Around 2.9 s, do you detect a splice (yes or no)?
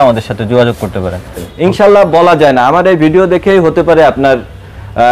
no